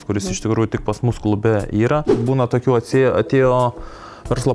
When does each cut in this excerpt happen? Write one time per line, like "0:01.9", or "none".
0:02.1